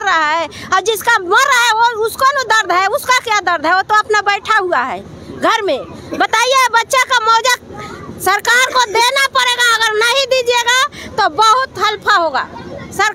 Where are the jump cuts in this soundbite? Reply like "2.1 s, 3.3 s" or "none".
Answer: none